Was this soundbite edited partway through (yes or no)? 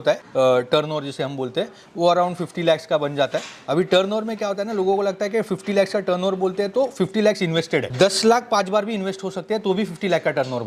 no